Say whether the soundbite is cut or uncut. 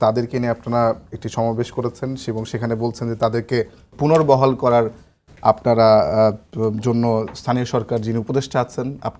uncut